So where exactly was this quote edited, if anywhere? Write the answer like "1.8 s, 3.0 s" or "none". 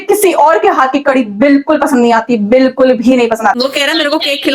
3.6 s